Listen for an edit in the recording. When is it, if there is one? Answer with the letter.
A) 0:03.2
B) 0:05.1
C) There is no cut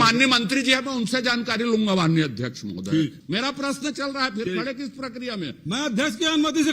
A